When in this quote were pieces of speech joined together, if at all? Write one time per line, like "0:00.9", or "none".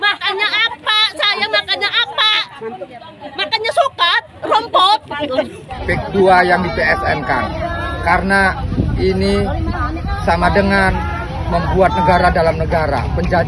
0:05.7